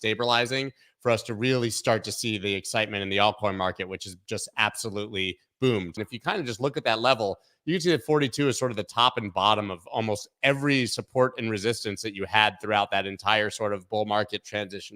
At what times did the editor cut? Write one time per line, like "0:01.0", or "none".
0:06.0

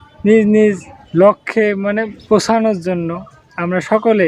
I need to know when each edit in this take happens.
0:02.2

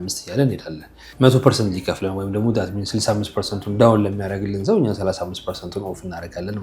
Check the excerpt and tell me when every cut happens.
0:01.0

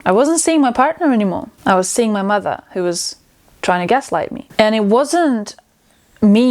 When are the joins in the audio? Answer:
0:01.5
0:04.4

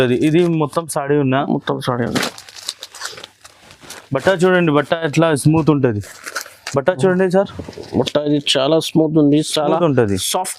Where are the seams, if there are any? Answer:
none

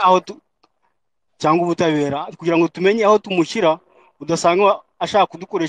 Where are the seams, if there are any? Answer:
none

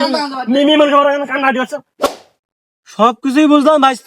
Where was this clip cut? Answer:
0:02.1

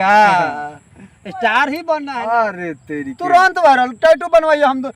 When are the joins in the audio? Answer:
0:02.1

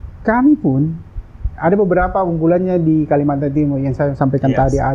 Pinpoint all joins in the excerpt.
none

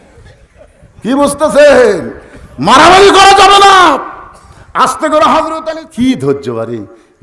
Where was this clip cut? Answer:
0:05.6

